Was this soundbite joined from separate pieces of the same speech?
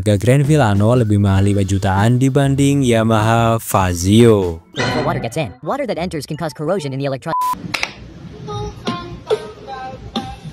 yes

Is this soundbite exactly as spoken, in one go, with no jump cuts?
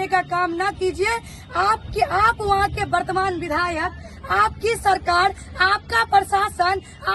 yes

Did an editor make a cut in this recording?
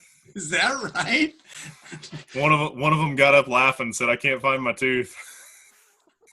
no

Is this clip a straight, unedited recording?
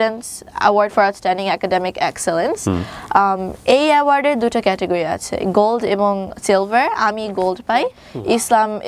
no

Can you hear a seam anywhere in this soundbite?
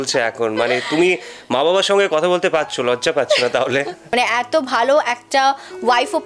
yes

